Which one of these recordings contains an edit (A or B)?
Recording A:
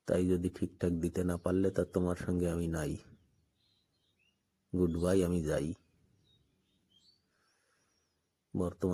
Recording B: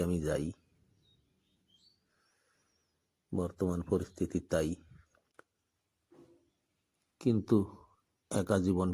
B